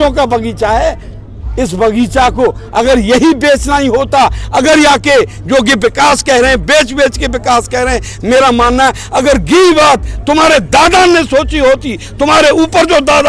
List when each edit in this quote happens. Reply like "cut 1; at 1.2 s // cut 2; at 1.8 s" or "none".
none